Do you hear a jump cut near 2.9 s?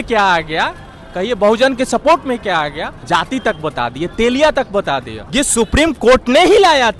yes; 2 cuts; at 2.9 s, 5.2 s

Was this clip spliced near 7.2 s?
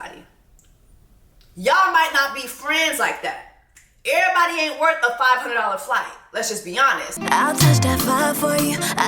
yes; 1 cut; at 7.2 s

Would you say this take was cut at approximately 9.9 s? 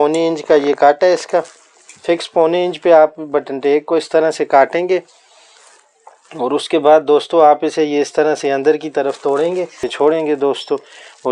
yes; 1 cut; at 9.9 s

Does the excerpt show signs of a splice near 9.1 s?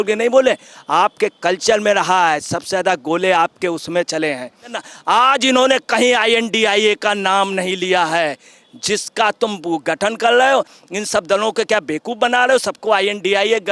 no; 1 cut; at 4.8 s

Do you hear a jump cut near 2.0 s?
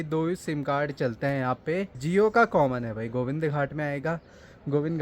yes; 1 cut; at 2.0 s

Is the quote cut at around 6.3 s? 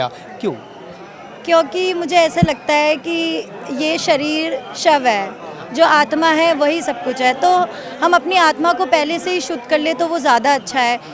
no; 0 cuts

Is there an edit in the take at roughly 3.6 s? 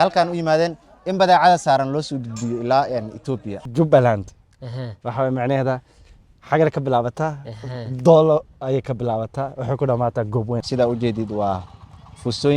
yes; 2 cuts; at 3.6 s, 10.6 s

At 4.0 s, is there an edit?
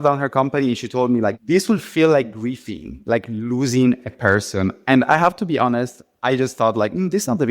no; 1 cut; at 1.3 s

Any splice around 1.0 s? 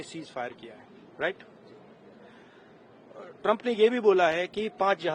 no; 0 cuts

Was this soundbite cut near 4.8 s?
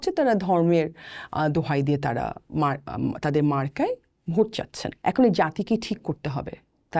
yes; 1 cut; at 4.8 s

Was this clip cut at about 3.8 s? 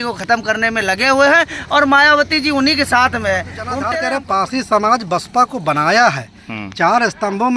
yes; 1 cut; at 3.8 s

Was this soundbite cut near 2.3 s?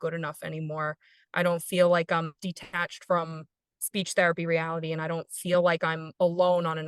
yes; 1 cut; at 2.3 s

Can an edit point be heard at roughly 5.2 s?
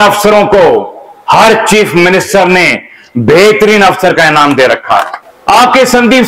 yes; 1 cut; at 5.2 s

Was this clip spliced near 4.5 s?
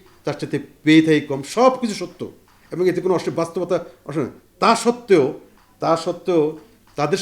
no; 0 cuts

